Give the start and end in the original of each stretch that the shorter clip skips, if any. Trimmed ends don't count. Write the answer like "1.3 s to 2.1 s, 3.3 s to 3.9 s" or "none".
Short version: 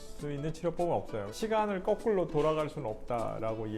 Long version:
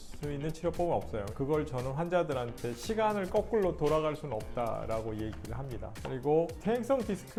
1.3 s to 2.8 s